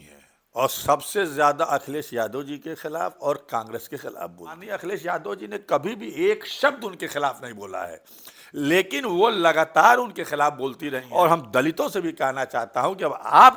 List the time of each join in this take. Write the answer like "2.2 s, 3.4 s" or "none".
4.7 s, 11.0 s